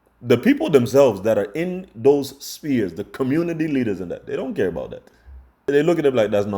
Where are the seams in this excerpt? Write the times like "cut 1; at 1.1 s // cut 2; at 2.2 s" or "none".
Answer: cut 1; at 5.7 s

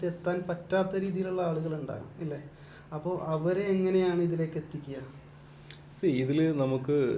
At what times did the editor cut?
none

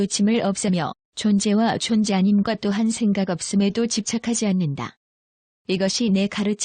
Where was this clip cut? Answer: cut 1; at 1.0 s // cut 2; at 3.9 s

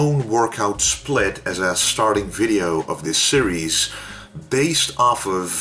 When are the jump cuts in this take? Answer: none

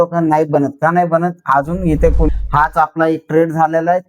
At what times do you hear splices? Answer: cut 1; at 2.3 s

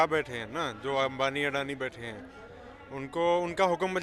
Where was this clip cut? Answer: none

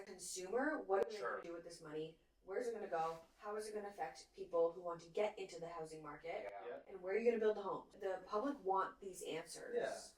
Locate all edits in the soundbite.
cut 1; at 7.9 s

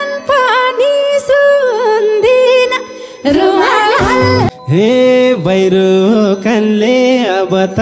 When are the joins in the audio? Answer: cut 1; at 4.5 s

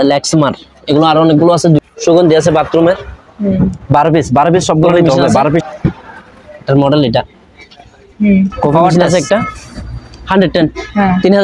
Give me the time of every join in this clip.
cut 1; at 1.8 s // cut 2; at 5.6 s // cut 3; at 8.9 s

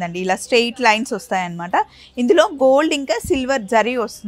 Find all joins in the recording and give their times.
none

